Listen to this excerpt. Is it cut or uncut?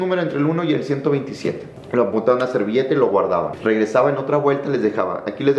cut